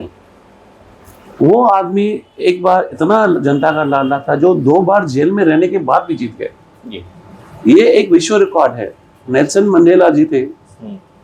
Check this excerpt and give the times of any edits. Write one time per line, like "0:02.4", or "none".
none